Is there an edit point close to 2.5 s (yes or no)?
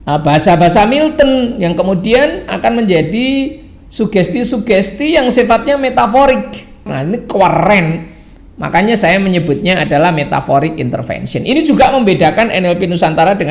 yes